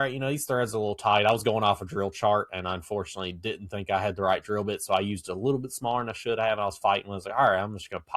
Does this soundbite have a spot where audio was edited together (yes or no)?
no